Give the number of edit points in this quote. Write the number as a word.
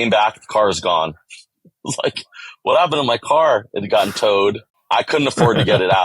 one